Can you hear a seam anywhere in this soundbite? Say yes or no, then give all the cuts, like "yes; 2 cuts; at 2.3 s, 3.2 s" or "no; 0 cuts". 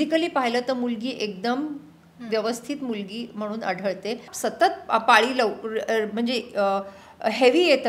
yes; 1 cut; at 4.3 s